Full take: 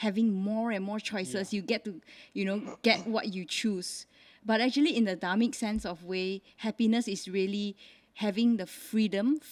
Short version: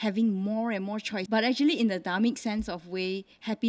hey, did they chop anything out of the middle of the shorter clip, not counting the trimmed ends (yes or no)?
yes